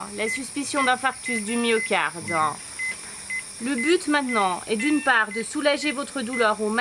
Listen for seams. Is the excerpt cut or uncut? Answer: uncut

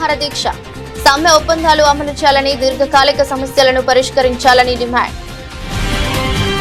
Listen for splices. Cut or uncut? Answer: uncut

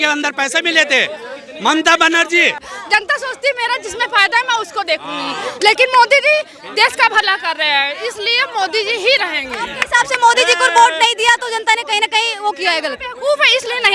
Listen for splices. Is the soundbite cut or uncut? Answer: cut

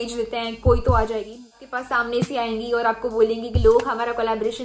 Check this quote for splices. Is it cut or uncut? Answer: cut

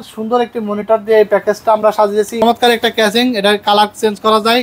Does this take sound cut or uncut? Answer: cut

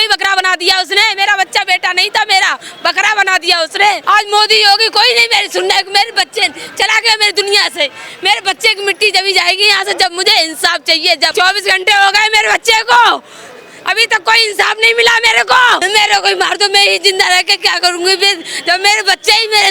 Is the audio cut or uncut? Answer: cut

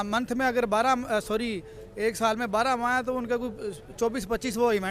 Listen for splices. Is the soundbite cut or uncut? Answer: uncut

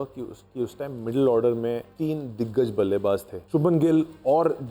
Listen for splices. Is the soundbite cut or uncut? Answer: cut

